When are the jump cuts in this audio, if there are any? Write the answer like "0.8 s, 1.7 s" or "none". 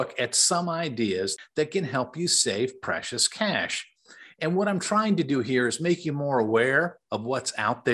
1.3 s